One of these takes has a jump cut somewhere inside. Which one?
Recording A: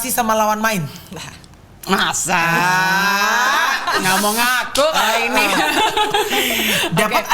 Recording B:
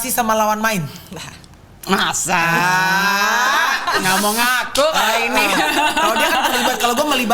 A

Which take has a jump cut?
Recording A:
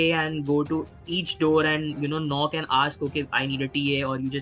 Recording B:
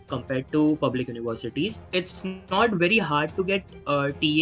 B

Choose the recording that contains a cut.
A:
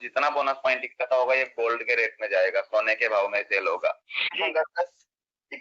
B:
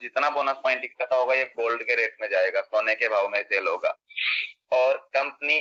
A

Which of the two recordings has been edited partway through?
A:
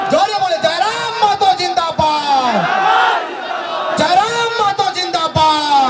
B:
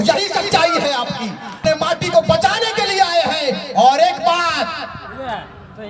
B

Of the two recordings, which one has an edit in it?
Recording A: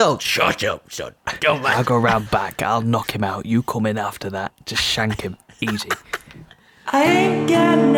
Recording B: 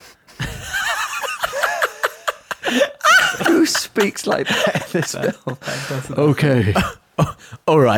A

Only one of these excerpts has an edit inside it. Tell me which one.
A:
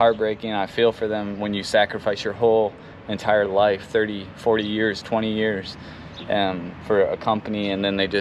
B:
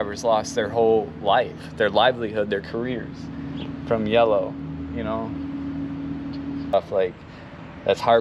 B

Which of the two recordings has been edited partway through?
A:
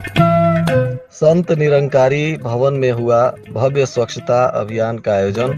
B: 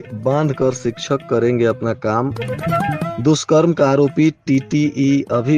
A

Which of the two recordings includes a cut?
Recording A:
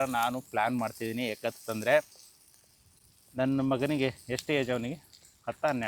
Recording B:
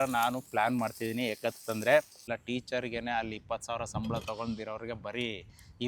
B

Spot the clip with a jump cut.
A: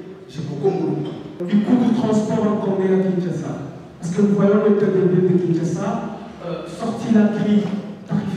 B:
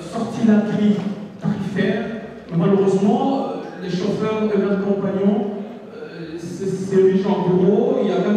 A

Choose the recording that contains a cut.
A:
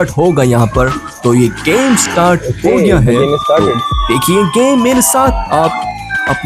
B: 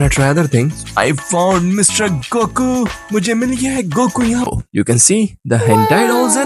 B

